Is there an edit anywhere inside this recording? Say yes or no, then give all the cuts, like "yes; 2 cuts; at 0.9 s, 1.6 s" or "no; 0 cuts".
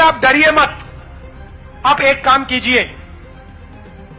yes; 1 cut; at 2.9 s